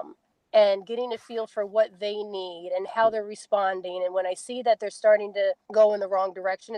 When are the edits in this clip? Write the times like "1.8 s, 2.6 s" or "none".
5.6 s